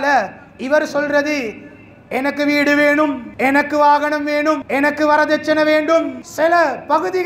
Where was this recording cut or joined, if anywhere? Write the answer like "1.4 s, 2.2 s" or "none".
3.3 s, 4.6 s, 6.2 s